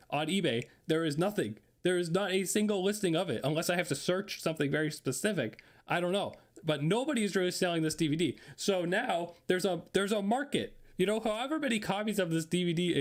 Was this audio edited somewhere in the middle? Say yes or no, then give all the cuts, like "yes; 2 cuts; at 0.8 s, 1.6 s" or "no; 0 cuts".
no; 0 cuts